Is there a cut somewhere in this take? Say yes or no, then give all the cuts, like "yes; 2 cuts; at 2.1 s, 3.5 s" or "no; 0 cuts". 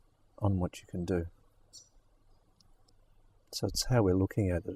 yes; 1 cut; at 2.9 s